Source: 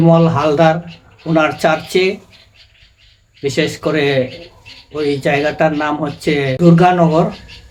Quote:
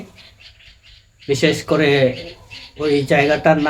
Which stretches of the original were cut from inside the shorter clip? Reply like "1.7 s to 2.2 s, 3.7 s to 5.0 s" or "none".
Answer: none